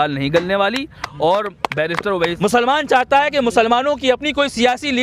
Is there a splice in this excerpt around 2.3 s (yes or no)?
yes